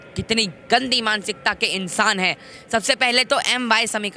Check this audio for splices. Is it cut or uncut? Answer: uncut